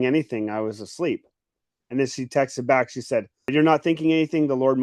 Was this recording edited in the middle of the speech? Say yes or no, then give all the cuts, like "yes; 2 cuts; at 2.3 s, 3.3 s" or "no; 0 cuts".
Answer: yes; 1 cut; at 3.5 s